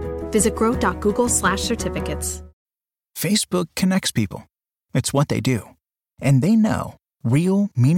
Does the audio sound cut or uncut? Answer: cut